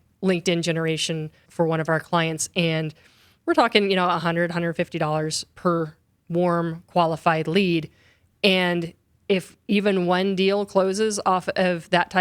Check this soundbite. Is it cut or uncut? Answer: cut